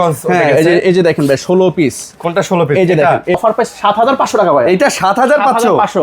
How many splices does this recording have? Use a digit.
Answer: 1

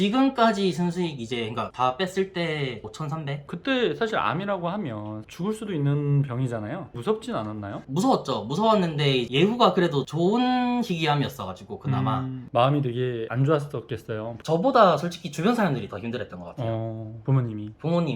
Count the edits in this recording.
1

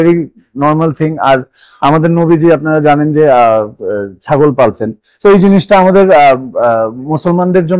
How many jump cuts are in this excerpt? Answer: 0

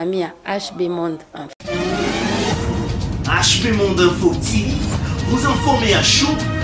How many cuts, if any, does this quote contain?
1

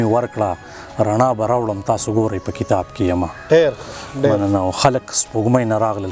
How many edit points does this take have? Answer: 0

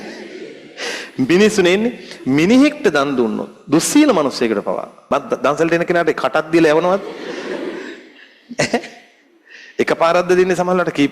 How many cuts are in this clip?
1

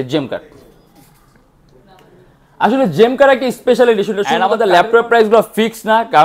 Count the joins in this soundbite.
1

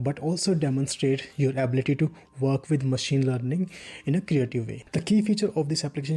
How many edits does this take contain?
1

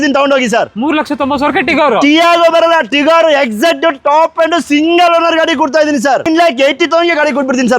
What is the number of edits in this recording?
1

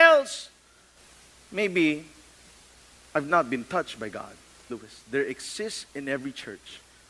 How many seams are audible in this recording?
1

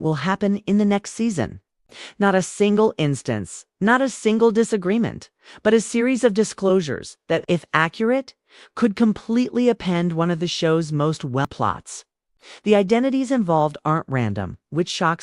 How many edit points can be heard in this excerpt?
1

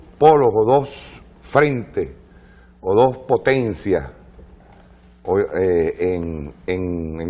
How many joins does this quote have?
1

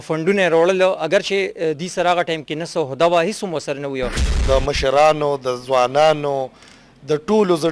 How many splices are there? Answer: 1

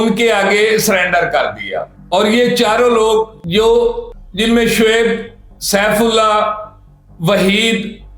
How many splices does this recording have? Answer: 0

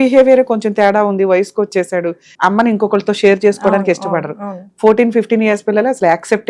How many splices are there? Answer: 1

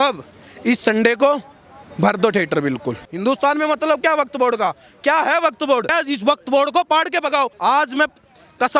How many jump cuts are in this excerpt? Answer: 3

